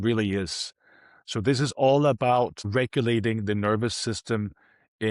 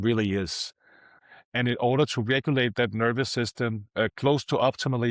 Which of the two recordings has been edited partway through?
second; 1 cut; at 1.2 s

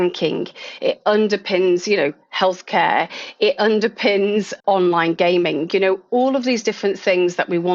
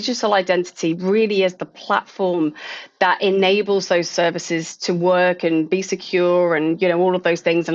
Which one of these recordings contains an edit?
first; 1 cut; at 4.6 s

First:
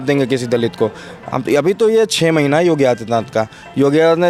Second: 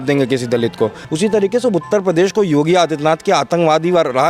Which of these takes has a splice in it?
second; 1 cut; at 1.0 s

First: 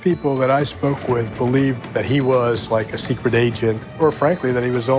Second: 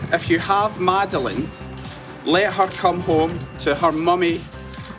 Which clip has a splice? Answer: first; 2 cuts; at 1.8 s, 3.9 s

